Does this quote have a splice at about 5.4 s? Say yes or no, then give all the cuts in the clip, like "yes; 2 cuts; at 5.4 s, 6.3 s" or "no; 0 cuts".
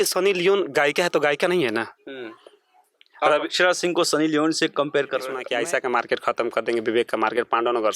yes; 1 cut; at 5.4 s